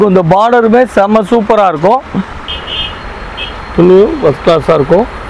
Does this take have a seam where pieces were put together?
yes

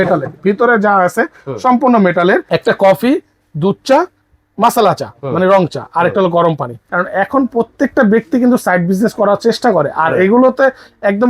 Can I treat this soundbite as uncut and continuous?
no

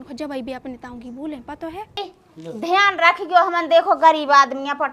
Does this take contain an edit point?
yes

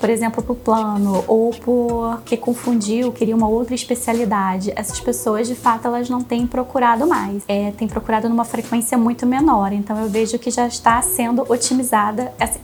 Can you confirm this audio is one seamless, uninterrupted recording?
yes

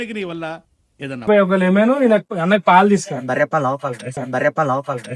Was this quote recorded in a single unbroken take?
no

